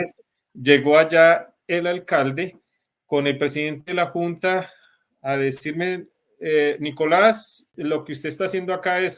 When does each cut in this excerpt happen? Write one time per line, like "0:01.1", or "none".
0:07.7